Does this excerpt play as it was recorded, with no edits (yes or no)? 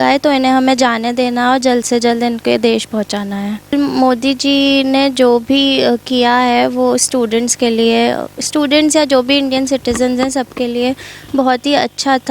no